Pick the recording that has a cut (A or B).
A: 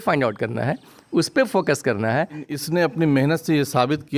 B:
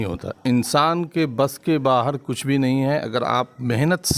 A